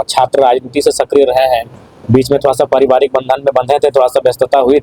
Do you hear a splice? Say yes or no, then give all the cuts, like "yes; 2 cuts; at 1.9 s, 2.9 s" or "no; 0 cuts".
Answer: no; 0 cuts